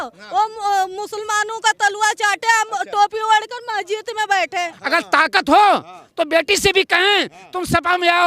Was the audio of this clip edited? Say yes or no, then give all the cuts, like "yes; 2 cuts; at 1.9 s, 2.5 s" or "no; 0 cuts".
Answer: yes; 1 cut; at 4.8 s